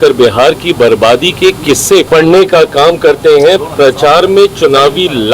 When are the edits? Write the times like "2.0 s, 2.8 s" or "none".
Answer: 2.1 s